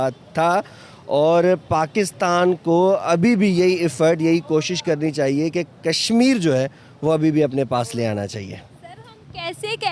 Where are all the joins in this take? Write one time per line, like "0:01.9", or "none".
none